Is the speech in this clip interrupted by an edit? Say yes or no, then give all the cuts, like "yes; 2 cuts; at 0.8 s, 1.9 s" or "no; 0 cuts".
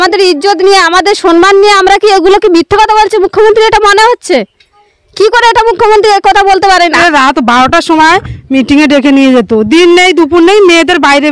no; 0 cuts